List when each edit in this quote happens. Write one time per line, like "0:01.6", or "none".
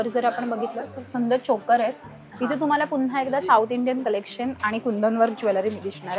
none